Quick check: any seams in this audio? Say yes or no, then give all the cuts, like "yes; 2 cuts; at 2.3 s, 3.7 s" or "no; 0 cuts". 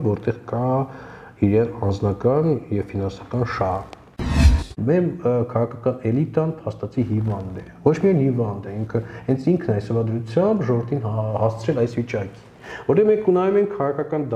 yes; 1 cut; at 4.3 s